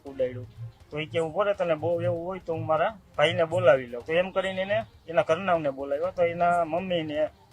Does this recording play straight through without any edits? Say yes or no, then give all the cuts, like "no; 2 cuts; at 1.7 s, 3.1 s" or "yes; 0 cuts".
no; 1 cut; at 3.9 s